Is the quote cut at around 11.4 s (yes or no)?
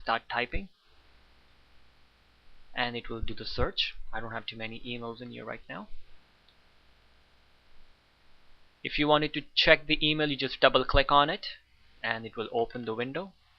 no